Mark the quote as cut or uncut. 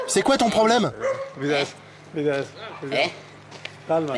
uncut